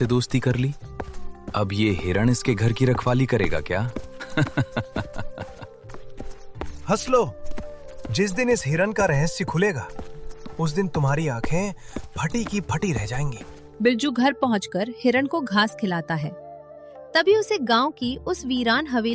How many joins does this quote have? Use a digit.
0